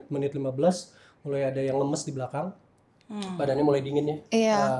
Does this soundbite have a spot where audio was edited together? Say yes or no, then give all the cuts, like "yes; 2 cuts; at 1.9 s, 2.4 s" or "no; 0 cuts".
no; 0 cuts